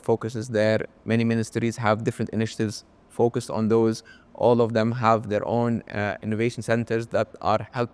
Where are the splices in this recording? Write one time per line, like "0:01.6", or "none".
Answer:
none

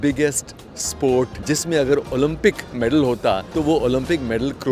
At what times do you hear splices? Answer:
0:01.4
0:03.5

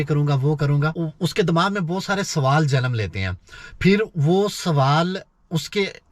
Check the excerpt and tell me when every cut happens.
0:00.9

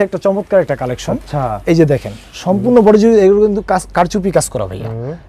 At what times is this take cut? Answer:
none

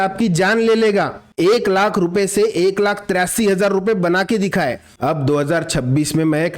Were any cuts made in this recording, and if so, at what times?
0:01.2
0:04.9

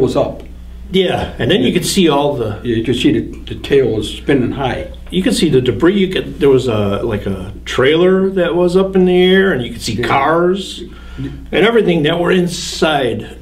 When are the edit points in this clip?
none

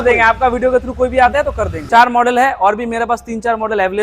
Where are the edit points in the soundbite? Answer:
0:01.8

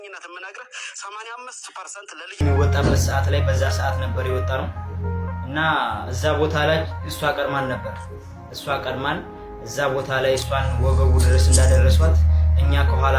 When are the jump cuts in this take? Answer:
0:02.4

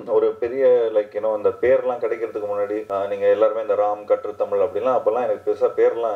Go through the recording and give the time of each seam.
0:02.8

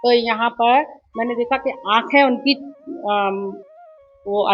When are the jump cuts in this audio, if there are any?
none

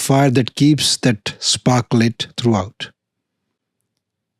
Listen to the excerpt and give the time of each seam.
none

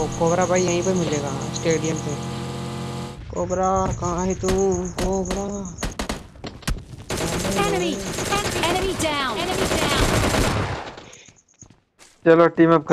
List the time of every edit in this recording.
none

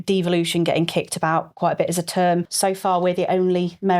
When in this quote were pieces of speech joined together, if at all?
0:02.5

